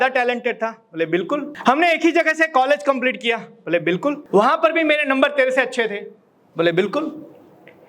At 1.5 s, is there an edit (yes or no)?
yes